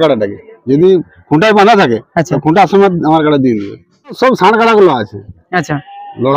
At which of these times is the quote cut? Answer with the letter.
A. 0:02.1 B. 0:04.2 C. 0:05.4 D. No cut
B